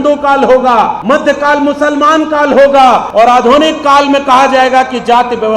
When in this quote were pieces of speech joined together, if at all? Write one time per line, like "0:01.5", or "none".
0:01.0
0:03.1

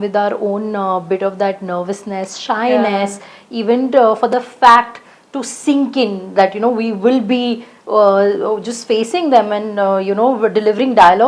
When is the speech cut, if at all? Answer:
none

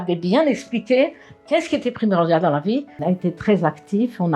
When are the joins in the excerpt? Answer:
0:03.0

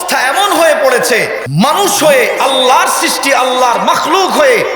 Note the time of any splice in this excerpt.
0:01.4

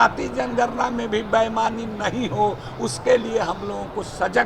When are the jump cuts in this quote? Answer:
none

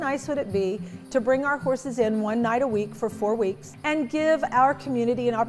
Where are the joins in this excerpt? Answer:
0:00.9
0:03.7

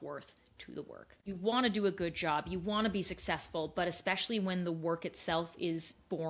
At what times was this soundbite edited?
0:01.1

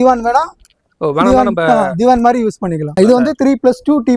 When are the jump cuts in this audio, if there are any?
0:02.9

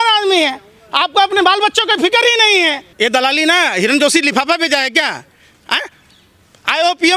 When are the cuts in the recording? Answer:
0:02.8

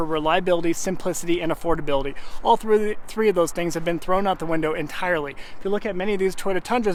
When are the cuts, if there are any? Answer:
none

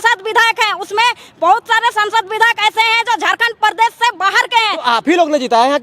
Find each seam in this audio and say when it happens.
none

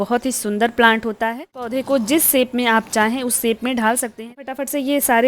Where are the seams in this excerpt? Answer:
0:01.8
0:04.4

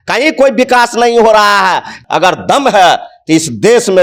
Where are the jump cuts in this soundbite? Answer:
0:02.0

